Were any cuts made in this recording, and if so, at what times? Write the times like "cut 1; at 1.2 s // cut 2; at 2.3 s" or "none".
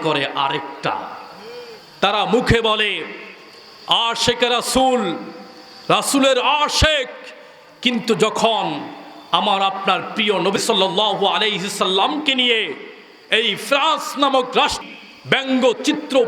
cut 1; at 10.6 s // cut 2; at 14.8 s